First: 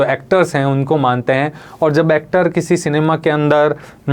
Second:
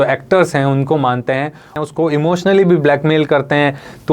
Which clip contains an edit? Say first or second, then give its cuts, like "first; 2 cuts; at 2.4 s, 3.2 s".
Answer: second; 1 cut; at 1.7 s